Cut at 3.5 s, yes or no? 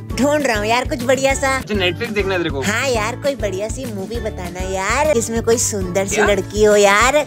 no